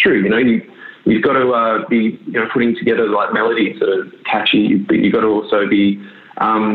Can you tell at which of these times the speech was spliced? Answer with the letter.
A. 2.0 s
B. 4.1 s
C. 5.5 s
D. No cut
D